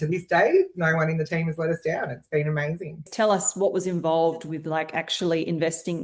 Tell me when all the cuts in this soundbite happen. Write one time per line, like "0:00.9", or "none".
0:03.1